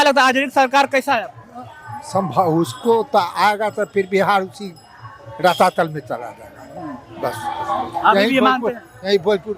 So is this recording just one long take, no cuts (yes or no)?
yes